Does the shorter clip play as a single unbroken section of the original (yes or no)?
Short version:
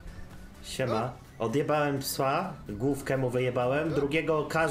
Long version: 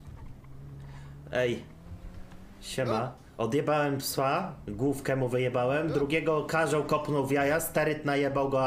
yes